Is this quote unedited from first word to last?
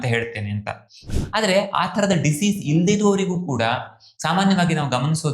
no; 1 cut; at 1.1 s

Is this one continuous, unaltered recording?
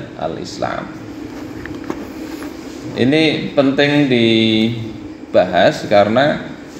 yes; 0 cuts

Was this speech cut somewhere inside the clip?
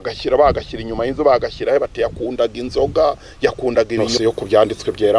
yes; 1 cut; at 4.1 s

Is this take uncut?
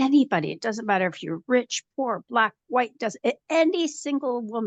yes; 0 cuts

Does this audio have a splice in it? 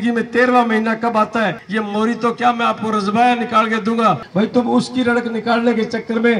yes; 2 cuts; at 1.6 s, 4.2 s

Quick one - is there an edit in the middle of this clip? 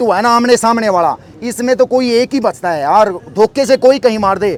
no; 0 cuts

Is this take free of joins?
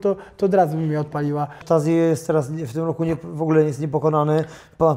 no; 1 cut; at 1.6 s

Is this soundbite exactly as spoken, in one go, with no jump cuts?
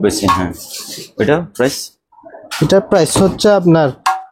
yes; 0 cuts

